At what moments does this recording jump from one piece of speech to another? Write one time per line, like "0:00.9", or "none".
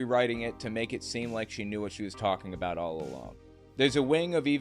0:03.7